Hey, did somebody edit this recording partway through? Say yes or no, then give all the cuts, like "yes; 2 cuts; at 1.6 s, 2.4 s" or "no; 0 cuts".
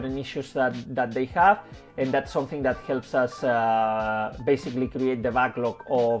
no; 0 cuts